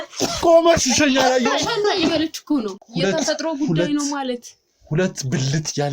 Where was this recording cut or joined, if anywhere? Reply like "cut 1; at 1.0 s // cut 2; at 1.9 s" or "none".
cut 1; at 2.8 s